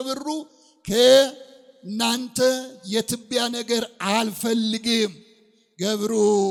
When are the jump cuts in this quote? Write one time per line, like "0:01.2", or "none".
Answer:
none